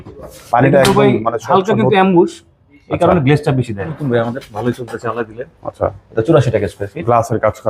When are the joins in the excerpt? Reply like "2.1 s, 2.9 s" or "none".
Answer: 4.0 s